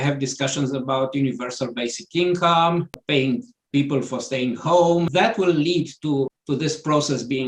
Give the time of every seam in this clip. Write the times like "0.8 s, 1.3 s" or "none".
3.0 s, 5.1 s, 6.3 s